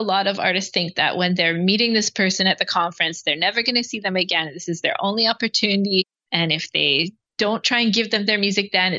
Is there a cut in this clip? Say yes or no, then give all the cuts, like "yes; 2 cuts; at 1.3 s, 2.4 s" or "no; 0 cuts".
no; 0 cuts